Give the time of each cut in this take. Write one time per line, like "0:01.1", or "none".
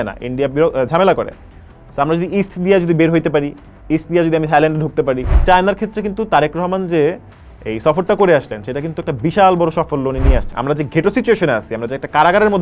0:05.4
0:10.5